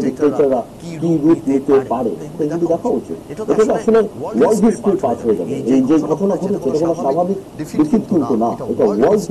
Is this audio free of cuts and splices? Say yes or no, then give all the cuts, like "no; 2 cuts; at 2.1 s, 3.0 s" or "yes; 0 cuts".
yes; 0 cuts